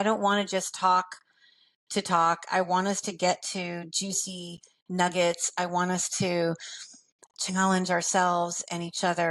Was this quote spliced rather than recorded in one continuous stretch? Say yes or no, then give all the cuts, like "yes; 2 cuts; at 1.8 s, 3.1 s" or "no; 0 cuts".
no; 0 cuts